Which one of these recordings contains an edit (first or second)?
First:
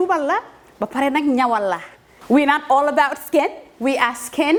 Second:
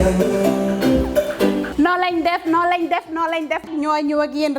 second